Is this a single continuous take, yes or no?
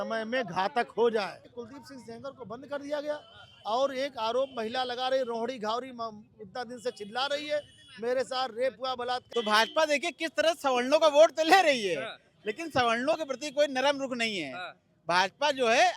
no